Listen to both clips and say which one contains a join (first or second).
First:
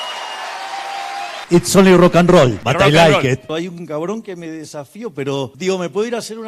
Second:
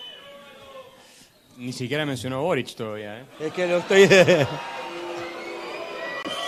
first